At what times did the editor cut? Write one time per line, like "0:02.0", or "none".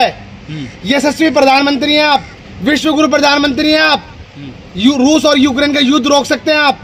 none